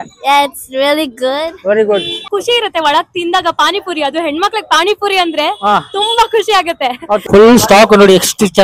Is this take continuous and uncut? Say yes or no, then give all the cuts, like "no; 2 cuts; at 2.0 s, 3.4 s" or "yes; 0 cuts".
no; 2 cuts; at 2.3 s, 7.2 s